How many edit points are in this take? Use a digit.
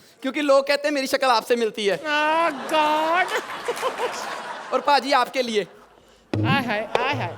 0